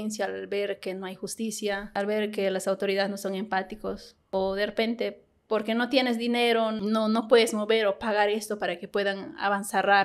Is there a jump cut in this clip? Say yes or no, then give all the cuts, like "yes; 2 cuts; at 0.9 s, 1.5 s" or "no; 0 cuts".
yes; 3 cuts; at 1.9 s, 4.1 s, 6.8 s